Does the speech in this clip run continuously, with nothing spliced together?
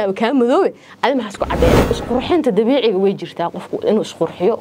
no; 1 cut; at 1.9 s

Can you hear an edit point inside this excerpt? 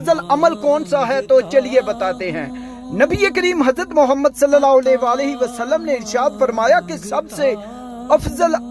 no; 0 cuts

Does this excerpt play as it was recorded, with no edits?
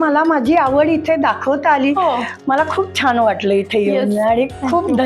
yes; 0 cuts

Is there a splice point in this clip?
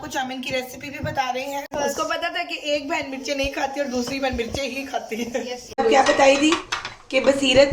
yes; 2 cuts; at 1.7 s, 5.8 s

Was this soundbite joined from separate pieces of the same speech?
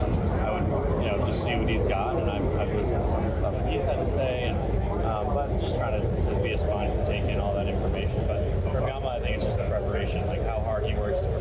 no; 0 cuts

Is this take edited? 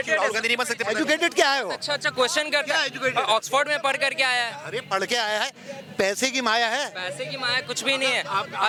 no; 0 cuts

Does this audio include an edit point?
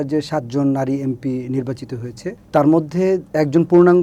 no; 0 cuts

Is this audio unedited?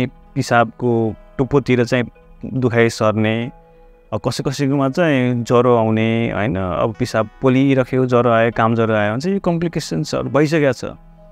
yes; 0 cuts

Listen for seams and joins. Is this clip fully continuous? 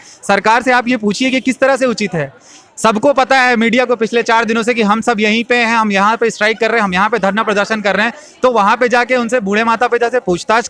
yes; 0 cuts

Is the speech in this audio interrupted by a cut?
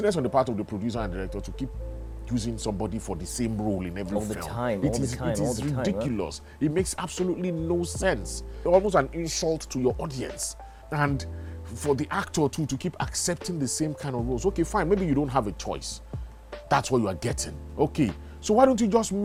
no; 0 cuts

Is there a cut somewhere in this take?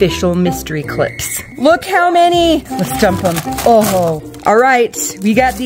yes; 3 cuts; at 1.4 s, 2.7 s, 4.3 s

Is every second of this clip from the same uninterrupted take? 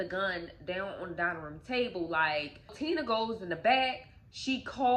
no; 1 cut; at 2.8 s

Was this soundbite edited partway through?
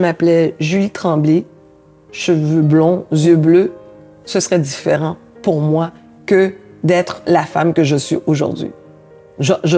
no; 0 cuts

